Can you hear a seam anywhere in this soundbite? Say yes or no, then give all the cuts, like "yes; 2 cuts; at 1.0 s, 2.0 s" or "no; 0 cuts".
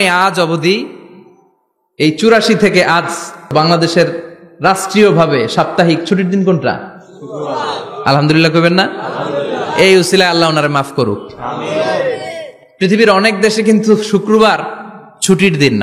yes; 1 cut; at 3.5 s